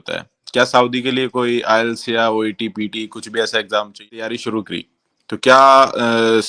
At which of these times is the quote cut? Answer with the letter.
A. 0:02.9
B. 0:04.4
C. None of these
B